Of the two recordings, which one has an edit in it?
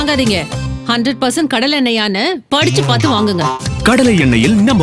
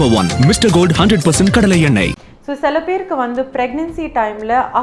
second; 1 cut; at 2.3 s

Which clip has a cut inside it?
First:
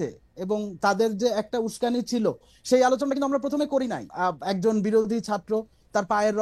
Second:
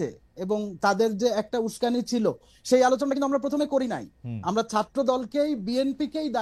first; 1 cut; at 4.0 s

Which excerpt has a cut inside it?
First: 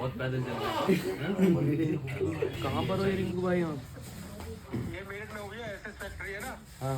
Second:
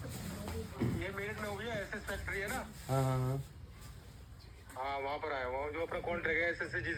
first; 1 cut; at 2.5 s

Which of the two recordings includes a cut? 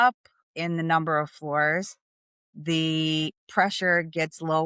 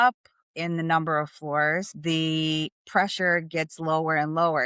second; 1 cut; at 1.9 s

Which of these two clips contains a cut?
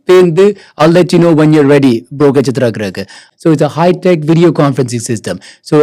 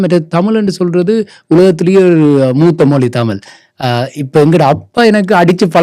first; 1 cut; at 3.3 s

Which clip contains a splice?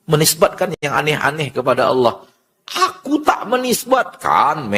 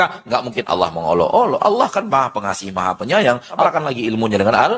second; 1 cut; at 3.6 s

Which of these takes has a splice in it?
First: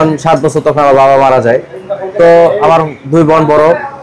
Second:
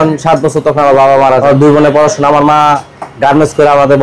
second; 1 cut; at 1.4 s

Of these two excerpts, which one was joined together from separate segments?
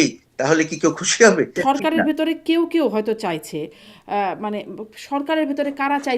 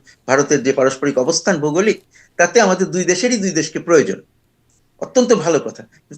first; 1 cut; at 1.5 s

